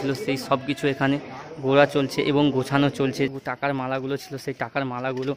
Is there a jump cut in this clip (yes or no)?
yes